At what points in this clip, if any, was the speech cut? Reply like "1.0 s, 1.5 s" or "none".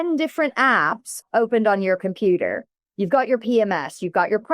1.2 s